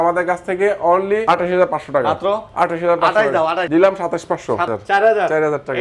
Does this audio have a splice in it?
yes; 3 cuts; at 1.2 s, 3.6 s, 4.7 s

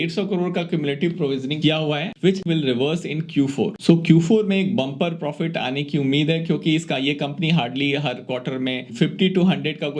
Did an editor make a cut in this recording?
yes; 2 cuts; at 2.4 s, 3.8 s

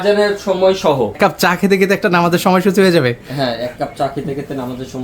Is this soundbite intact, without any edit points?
no; 1 cut; at 1.2 s

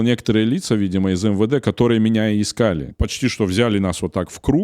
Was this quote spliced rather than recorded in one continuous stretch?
yes; 1 cut; at 2.9 s

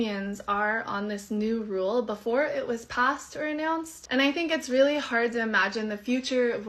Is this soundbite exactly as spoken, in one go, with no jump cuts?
no; 1 cut; at 4.0 s

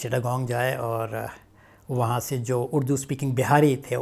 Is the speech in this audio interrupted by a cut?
no; 0 cuts

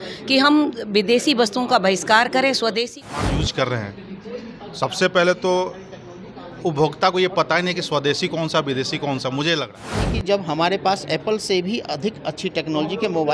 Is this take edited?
yes; 2 cuts; at 3.0 s, 10.1 s

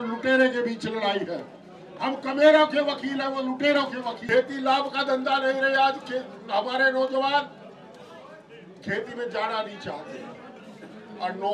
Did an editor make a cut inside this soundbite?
yes; 1 cut; at 4.2 s

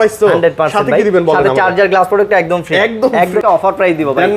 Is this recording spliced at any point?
yes; 1 cut; at 3.4 s

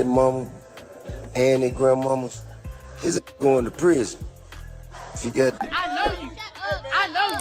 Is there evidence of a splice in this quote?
yes; 1 cut; at 5.7 s

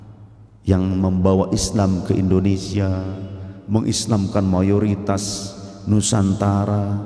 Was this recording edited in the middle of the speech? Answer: no; 0 cuts

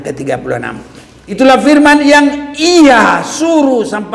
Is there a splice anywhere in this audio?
yes; 1 cut; at 1.4 s

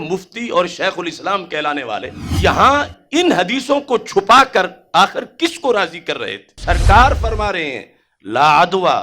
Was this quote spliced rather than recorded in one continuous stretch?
yes; 2 cuts; at 2.2 s, 6.6 s

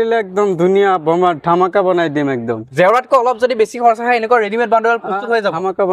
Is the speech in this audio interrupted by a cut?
no; 0 cuts

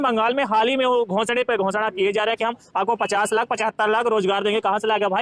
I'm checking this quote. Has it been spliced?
no; 0 cuts

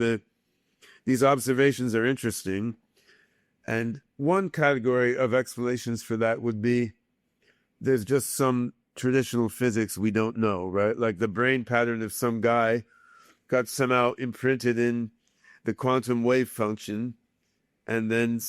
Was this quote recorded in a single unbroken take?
yes; 0 cuts

